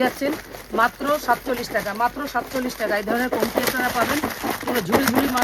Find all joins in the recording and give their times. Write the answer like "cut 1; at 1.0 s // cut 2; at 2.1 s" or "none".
none